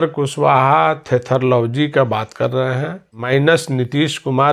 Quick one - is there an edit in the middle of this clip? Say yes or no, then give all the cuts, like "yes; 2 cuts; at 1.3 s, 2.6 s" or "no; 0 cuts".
yes; 1 cut; at 3.1 s